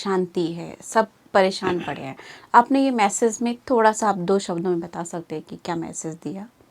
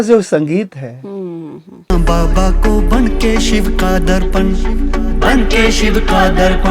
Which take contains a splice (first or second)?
second